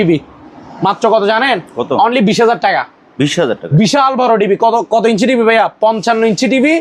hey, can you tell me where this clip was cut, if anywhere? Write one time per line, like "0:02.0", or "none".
none

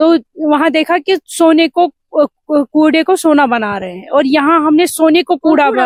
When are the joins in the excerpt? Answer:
none

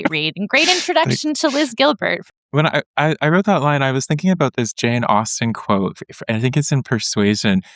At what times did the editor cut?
0:02.2

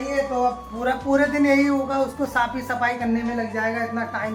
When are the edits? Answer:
none

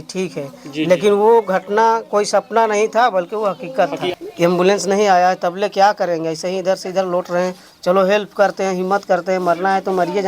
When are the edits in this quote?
0:04.1

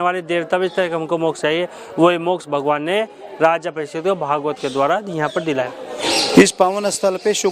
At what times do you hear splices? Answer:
0:06.0

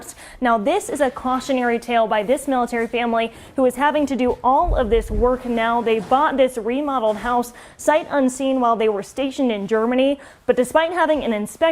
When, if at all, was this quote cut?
none

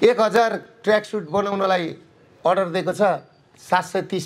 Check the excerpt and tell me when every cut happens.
none

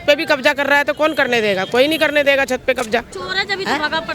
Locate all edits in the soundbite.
0:03.2

